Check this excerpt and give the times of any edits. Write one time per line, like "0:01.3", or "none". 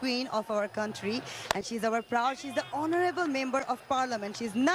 0:03.6